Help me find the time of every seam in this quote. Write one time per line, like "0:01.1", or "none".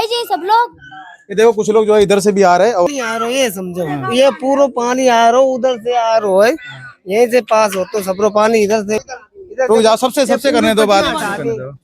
0:02.9
0:09.0